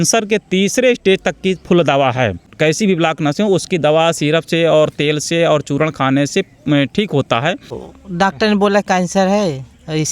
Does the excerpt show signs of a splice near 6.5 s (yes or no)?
no